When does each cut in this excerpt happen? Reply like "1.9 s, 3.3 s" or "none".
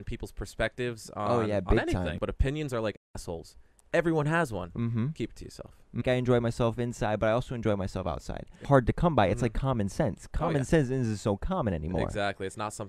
2.2 s, 6.0 s, 8.6 s